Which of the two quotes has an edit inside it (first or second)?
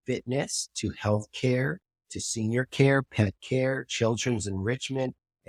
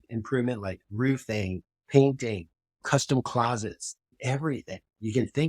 second